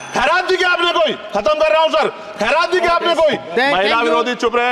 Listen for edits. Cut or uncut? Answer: cut